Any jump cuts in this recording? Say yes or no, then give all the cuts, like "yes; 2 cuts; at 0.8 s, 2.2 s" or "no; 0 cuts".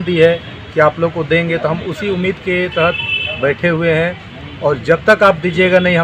no; 0 cuts